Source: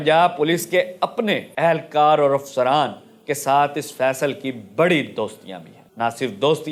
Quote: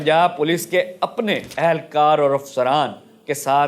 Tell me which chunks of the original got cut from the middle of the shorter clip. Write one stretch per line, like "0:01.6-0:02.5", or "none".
none